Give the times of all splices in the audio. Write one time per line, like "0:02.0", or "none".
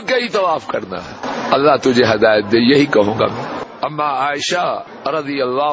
0:03.7
0:04.9